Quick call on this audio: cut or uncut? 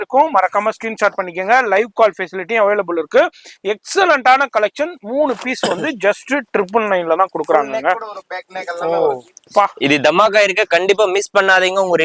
uncut